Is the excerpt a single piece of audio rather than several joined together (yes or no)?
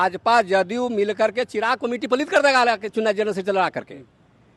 yes